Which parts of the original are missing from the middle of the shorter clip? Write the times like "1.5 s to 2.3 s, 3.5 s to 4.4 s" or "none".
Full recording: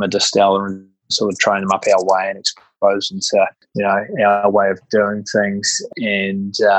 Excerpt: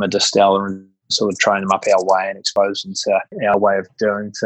2.4 s to 2.6 s, 3.8 s to 4.4 s